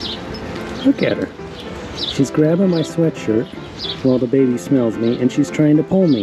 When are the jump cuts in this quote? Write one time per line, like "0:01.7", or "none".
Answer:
none